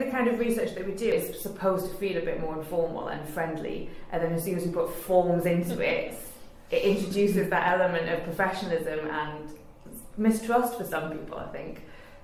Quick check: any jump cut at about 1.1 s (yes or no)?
yes